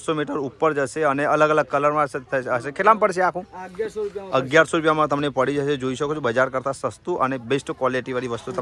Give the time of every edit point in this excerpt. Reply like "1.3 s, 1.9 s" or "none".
none